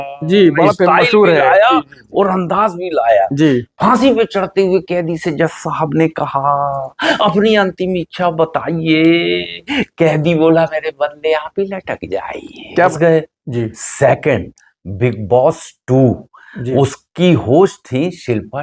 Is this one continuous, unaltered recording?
no; 1 cut; at 12.9 s

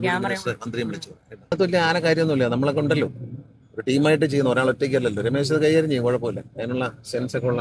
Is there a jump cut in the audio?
yes; 1 cut; at 1.5 s

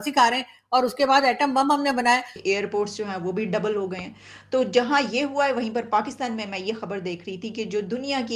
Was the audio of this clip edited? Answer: yes; 1 cut; at 2.3 s

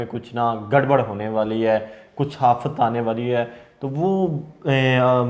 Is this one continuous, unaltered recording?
yes; 0 cuts

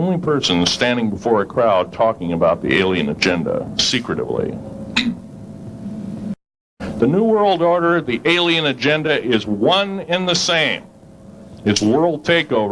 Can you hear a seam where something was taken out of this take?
yes; 1 cut; at 6.6 s

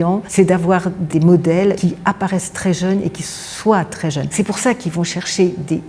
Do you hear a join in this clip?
yes; 2 cuts; at 1.0 s, 1.8 s

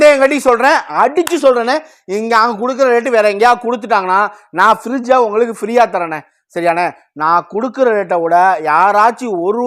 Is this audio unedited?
yes; 0 cuts

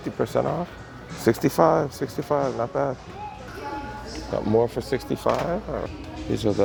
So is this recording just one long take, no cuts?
yes; 0 cuts

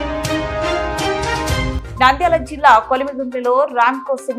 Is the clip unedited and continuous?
no; 1 cut; at 1.8 s

